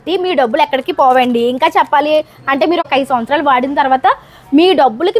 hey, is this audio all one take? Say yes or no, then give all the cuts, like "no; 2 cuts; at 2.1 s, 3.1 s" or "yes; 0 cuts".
no; 1 cut; at 2.9 s